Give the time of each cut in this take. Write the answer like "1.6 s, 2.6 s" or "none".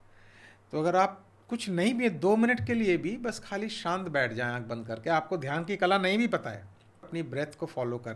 7.1 s